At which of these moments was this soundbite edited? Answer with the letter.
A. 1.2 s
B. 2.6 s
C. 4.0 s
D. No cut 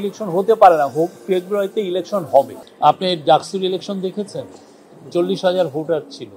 B